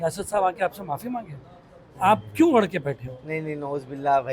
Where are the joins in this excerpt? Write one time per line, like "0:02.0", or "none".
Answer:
none

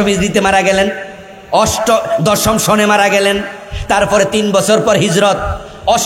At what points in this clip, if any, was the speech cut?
none

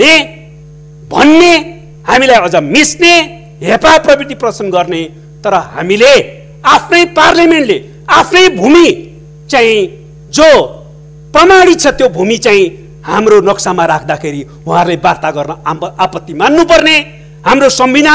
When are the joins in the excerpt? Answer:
none

